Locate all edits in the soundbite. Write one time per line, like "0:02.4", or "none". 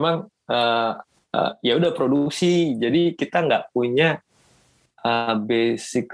none